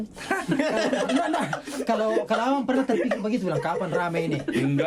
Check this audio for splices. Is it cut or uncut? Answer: uncut